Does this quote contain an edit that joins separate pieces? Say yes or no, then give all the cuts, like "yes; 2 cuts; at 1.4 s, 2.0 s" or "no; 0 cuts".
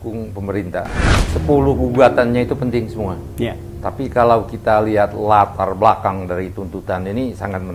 yes; 1 cut; at 1.3 s